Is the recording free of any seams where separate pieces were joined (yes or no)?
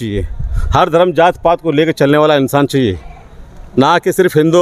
yes